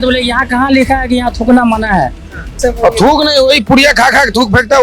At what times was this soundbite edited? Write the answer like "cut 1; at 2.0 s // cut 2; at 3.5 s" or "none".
cut 1; at 2.6 s